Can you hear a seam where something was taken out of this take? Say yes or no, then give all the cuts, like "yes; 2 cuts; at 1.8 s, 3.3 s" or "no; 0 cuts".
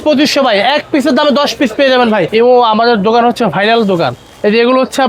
yes; 1 cut; at 2.3 s